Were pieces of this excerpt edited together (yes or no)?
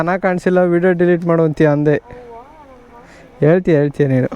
no